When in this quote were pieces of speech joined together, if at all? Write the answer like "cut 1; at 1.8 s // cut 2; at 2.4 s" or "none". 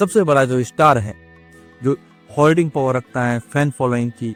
none